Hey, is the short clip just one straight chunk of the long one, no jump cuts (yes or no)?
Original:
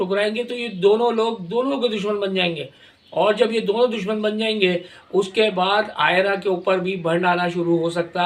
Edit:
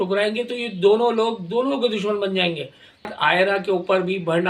no